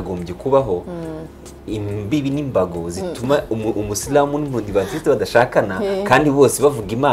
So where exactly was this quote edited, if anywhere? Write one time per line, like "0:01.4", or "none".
none